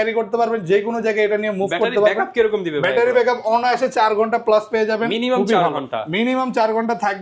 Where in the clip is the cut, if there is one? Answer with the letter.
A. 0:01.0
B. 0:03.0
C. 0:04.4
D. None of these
D